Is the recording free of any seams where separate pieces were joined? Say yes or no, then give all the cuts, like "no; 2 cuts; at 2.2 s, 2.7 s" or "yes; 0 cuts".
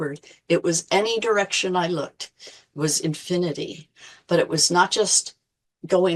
yes; 0 cuts